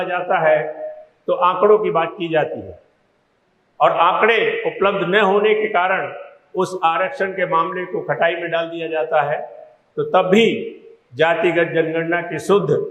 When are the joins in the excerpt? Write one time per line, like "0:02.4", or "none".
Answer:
none